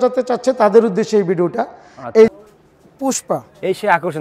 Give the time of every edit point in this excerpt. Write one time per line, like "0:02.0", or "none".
0:02.3